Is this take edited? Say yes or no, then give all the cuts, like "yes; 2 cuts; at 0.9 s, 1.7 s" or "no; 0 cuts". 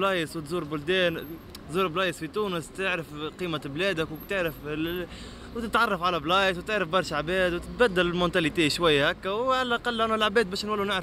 no; 0 cuts